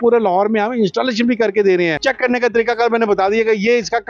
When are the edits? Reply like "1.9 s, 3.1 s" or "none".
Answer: 2.0 s